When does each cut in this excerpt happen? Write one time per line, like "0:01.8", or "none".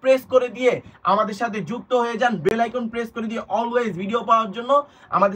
none